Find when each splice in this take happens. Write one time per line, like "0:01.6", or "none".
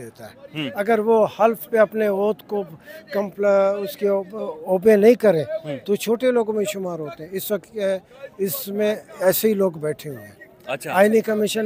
none